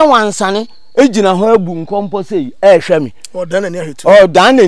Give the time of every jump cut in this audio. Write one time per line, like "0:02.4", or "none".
none